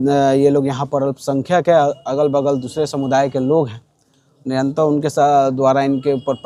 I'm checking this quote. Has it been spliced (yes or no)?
no